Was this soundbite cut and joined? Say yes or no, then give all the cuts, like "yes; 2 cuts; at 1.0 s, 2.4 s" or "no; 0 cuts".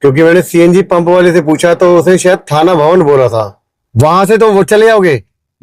yes; 1 cut; at 3.7 s